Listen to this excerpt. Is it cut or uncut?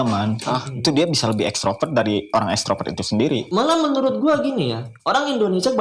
cut